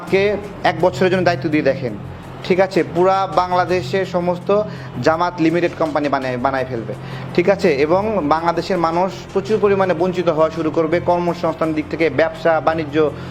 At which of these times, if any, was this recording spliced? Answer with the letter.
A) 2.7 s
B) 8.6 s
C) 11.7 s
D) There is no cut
D